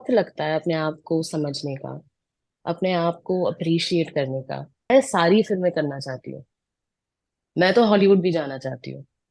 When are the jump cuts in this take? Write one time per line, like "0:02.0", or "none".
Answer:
0:04.9